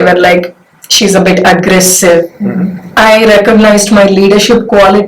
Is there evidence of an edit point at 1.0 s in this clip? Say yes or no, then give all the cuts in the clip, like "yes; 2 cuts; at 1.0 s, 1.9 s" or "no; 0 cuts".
no; 1 cut; at 2.3 s